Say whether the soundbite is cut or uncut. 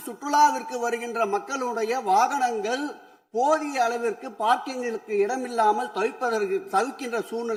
uncut